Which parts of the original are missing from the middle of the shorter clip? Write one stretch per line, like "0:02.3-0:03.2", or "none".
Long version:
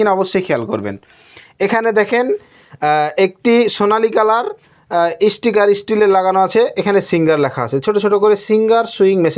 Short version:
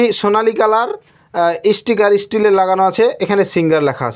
none